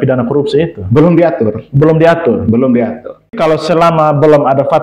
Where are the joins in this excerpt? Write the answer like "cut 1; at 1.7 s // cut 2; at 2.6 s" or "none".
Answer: cut 1; at 3.3 s